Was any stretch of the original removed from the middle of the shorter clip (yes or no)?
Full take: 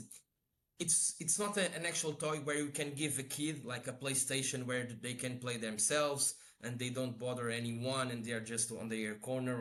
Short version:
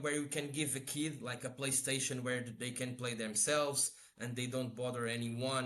no